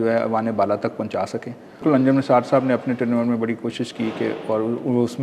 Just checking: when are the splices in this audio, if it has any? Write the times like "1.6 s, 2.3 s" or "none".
1.8 s